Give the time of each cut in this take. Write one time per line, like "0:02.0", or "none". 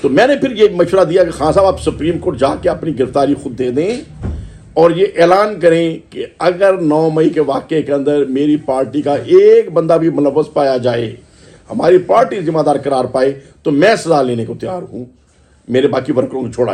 none